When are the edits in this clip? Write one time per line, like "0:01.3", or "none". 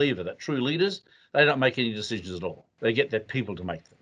0:02.7